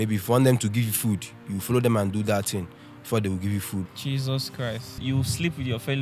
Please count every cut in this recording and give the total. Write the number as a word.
two